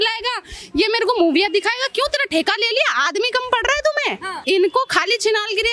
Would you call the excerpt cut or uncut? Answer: cut